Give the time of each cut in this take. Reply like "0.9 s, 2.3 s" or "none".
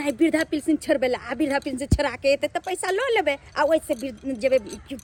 none